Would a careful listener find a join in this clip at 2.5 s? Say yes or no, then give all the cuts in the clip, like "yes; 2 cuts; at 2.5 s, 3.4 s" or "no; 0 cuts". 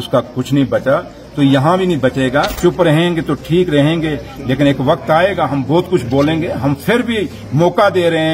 yes; 1 cut; at 2.5 s